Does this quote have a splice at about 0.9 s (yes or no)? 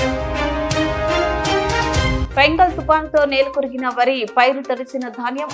no